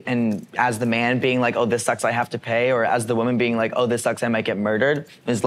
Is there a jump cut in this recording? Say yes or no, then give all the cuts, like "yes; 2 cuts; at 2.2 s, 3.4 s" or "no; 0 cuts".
no; 0 cuts